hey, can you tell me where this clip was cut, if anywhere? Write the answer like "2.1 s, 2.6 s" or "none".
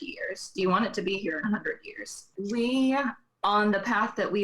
2.3 s

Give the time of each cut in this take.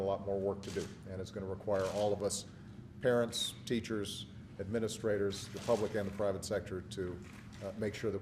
5.3 s

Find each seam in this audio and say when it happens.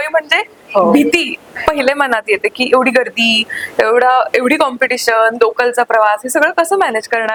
none

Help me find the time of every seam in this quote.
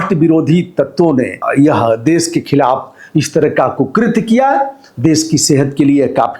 1.4 s

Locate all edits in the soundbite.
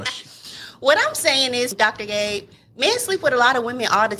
1.7 s

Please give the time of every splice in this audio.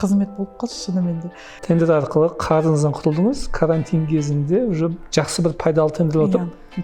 1.5 s

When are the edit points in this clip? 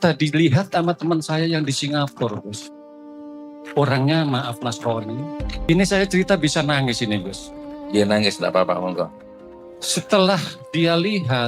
5.7 s

